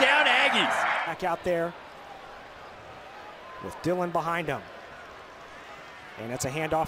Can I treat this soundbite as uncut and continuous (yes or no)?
no